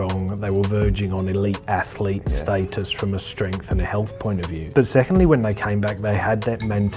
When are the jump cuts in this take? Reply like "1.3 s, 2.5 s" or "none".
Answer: 4.6 s